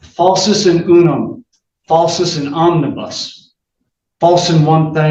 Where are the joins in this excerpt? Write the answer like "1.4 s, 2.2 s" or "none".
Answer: none